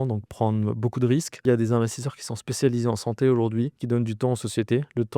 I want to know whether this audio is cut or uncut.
cut